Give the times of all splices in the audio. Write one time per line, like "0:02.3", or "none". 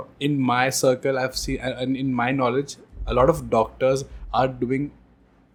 none